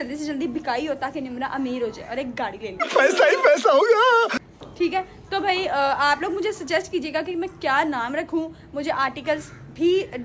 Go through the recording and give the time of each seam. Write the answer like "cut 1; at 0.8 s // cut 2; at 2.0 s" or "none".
none